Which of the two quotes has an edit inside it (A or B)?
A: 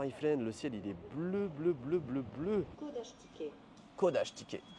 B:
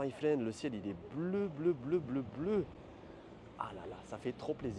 A